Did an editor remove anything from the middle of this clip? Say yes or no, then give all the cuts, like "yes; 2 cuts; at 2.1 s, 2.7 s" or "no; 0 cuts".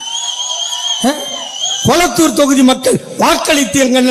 no; 0 cuts